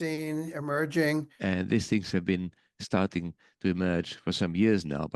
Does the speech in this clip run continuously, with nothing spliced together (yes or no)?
no